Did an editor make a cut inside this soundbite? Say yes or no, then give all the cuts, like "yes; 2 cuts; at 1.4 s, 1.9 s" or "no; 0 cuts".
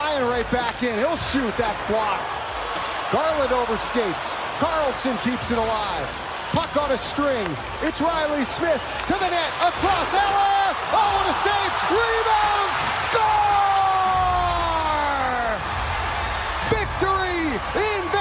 no; 0 cuts